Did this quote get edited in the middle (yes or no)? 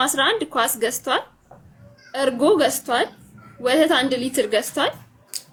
no